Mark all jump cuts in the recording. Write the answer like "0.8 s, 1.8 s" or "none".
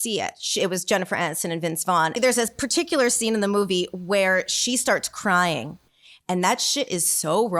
2.1 s